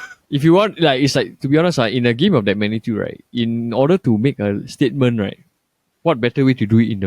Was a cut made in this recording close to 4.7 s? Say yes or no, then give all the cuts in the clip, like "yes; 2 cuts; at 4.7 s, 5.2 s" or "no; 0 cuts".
yes; 1 cut; at 4.7 s